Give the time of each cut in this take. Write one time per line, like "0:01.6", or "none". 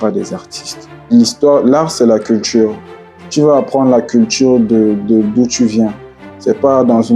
0:01.1